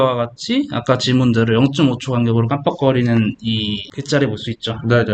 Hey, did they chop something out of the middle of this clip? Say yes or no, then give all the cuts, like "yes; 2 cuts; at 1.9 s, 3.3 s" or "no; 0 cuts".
yes; 1 cut; at 3.9 s